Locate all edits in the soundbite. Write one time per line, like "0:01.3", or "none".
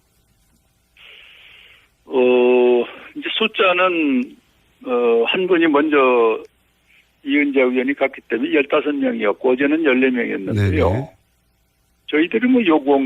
0:11.0